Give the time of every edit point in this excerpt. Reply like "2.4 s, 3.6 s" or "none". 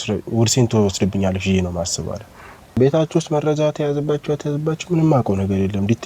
2.7 s

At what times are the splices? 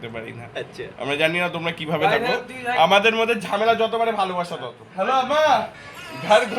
5.3 s

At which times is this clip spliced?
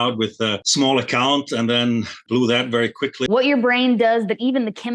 3.3 s

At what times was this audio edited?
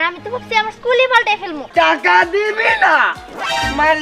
1.6 s

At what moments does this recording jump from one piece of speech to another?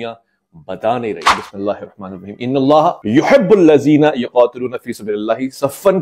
1.4 s

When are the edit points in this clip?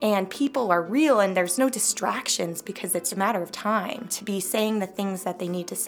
1.5 s, 3.1 s, 4.1 s

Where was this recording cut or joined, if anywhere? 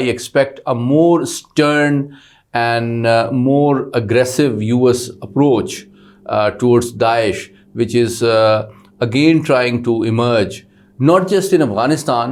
none

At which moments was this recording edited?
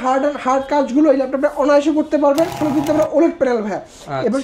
2.6 s

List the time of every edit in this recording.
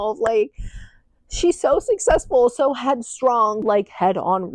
3.6 s

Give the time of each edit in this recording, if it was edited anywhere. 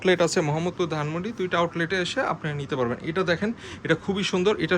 none

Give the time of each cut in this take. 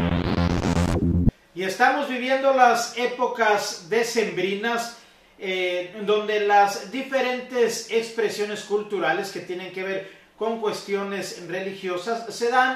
1.2 s

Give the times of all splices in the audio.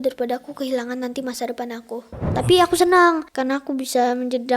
2.2 s, 3.3 s

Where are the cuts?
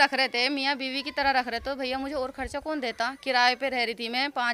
none

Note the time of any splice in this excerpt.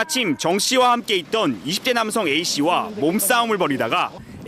3.2 s

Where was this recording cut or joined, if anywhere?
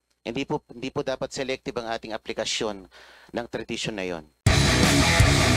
4.3 s

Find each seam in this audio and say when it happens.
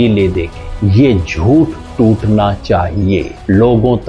none

